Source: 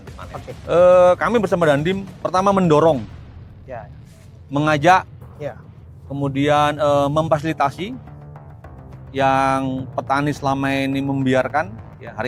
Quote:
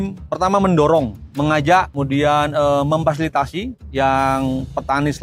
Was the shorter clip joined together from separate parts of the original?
yes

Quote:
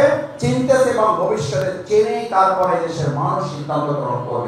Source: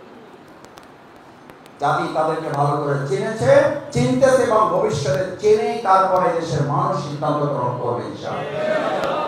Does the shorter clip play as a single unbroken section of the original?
yes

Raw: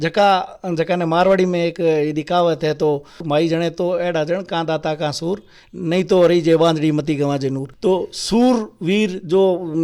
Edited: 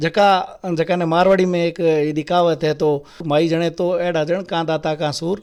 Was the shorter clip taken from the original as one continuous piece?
yes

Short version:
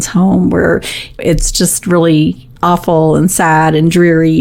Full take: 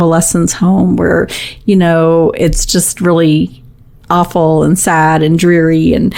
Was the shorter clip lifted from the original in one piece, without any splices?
no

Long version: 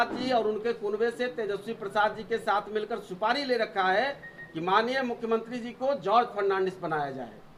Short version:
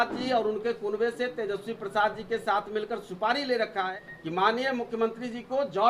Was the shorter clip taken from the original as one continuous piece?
no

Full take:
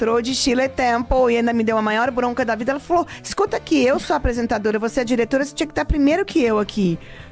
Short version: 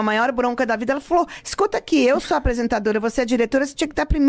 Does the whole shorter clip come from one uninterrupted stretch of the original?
yes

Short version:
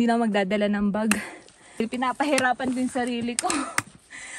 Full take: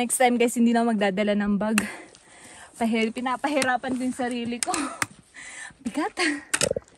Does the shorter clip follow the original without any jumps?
no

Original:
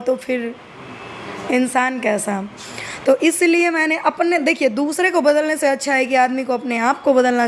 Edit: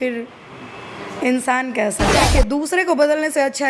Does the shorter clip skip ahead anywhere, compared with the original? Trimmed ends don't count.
yes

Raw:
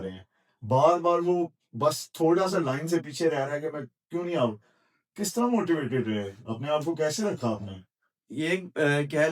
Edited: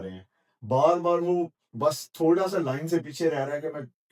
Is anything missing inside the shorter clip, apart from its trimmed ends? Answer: no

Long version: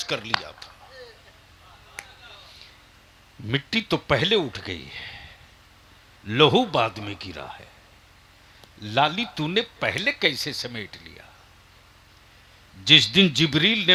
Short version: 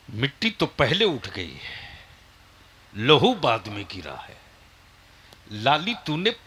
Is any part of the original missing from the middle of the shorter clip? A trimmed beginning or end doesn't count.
no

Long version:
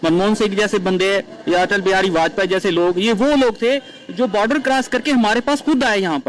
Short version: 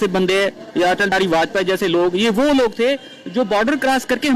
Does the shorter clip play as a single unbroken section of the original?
no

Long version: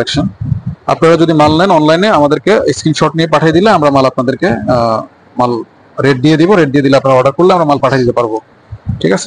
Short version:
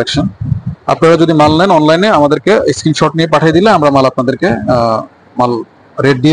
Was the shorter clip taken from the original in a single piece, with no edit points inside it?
yes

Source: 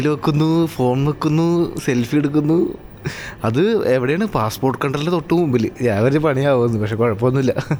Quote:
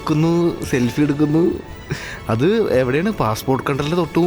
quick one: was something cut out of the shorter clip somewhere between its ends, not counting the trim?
no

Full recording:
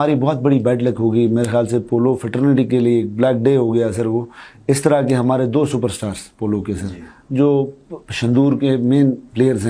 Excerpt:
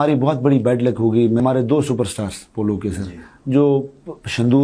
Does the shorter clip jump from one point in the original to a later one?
yes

